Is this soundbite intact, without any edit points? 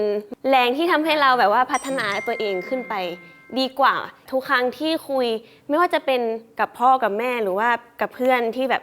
no; 1 cut; at 4.1 s

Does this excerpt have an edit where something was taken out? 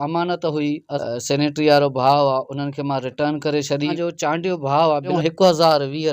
yes; 3 cuts; at 0.9 s, 3.9 s, 5.1 s

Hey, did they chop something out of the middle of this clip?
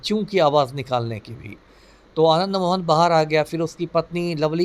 no; 0 cuts

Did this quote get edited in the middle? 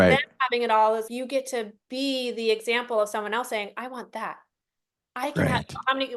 yes; 1 cut; at 1.0 s

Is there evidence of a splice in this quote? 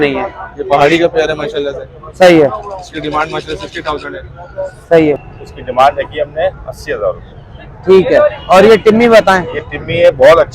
yes; 1 cut; at 5.2 s

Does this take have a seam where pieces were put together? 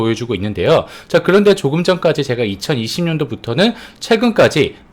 no; 0 cuts

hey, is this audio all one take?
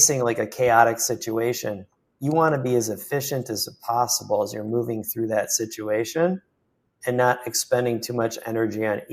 yes; 0 cuts

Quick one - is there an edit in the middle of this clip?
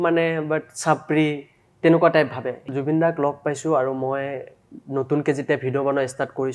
yes; 1 cut; at 2.7 s

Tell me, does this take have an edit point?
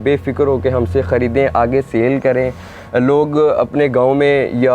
no; 0 cuts

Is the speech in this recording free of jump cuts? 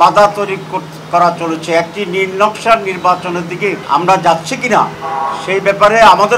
no; 2 cuts; at 3.8 s, 5.0 s

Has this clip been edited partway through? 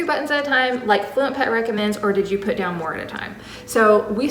no; 0 cuts

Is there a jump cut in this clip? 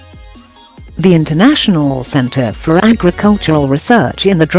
yes; 1 cut; at 0.9 s

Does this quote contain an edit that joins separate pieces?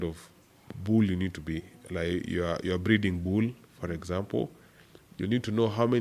no; 0 cuts

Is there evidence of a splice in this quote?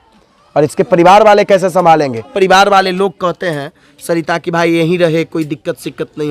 yes; 1 cut; at 2.3 s

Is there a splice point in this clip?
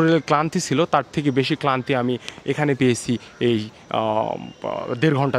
no; 0 cuts

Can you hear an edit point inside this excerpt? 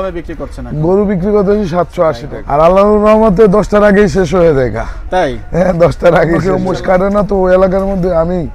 yes; 2 cuts; at 2.3 s, 6.5 s

